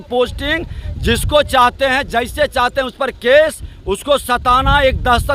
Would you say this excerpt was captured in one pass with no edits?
yes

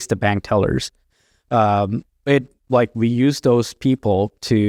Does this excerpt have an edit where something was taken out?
no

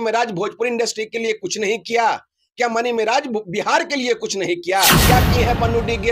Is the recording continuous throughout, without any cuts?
no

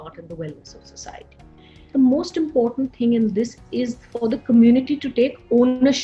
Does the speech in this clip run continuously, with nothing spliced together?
no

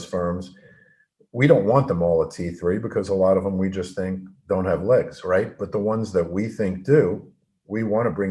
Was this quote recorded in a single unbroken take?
yes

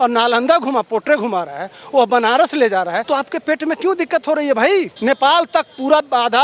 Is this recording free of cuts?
no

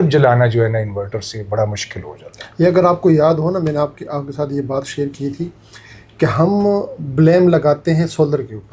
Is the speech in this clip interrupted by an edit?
no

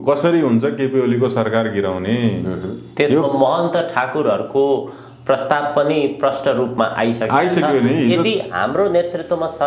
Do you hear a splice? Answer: no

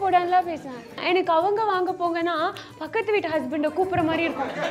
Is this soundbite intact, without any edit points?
no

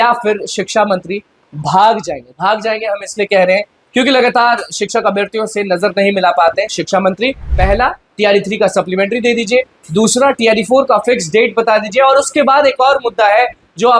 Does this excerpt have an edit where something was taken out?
yes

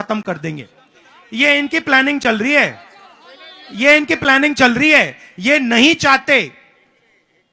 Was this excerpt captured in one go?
yes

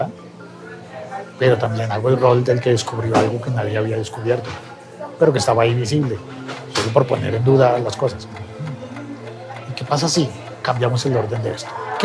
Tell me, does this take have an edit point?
no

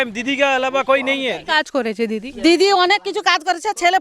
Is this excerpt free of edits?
no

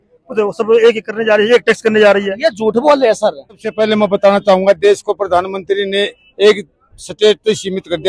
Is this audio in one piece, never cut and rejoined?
no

